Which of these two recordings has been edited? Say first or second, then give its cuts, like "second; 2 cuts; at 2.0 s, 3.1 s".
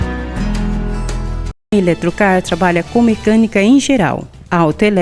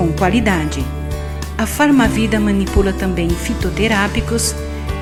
first; 1 cut; at 1.6 s